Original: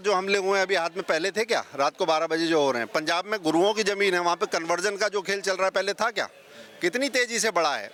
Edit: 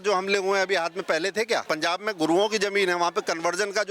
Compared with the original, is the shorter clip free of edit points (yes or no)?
no